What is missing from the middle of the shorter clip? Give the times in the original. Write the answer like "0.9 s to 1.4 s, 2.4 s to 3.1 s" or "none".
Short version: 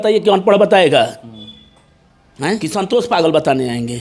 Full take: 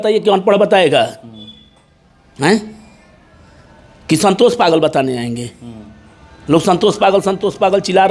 2.6 s to 4.1 s